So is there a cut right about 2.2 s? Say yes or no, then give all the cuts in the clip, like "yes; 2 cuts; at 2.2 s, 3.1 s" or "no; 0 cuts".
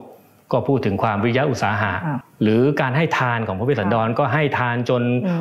yes; 1 cut; at 2.2 s